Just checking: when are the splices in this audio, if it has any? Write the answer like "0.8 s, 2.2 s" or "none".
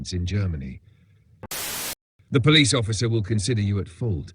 1.7 s